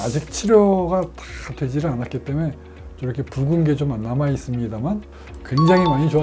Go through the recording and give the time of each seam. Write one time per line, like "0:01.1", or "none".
0:05.1